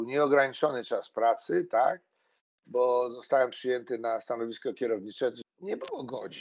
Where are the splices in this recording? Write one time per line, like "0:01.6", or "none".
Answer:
0:05.4